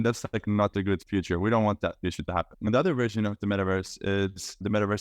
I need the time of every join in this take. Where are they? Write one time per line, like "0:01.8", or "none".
0:02.5